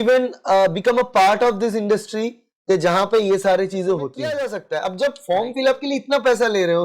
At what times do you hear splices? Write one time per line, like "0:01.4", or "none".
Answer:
0:04.2